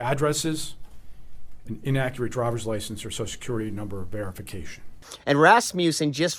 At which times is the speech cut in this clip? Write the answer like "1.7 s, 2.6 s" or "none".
none